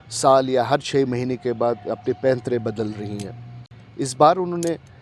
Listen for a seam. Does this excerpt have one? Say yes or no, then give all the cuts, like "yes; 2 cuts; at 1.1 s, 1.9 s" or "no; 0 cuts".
no; 0 cuts